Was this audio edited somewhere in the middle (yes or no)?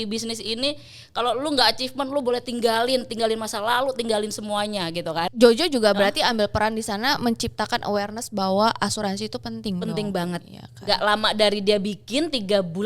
yes